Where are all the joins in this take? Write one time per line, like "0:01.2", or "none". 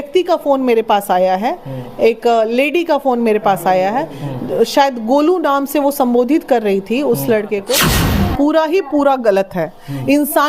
0:08.0